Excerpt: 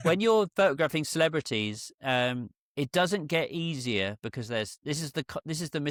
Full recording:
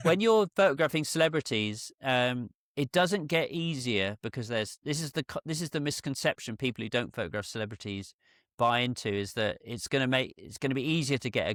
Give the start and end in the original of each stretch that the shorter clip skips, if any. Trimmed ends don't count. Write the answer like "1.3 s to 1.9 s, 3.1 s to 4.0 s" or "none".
none